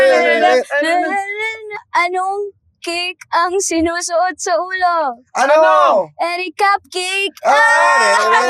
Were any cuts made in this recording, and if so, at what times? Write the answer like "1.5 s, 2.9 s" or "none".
1.8 s